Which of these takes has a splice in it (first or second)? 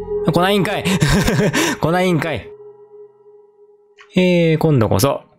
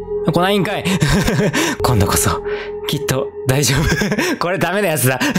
second